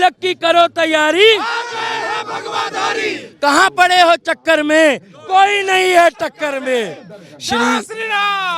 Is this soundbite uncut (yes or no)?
yes